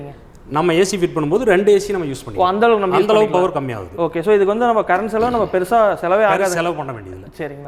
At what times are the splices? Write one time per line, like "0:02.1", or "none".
none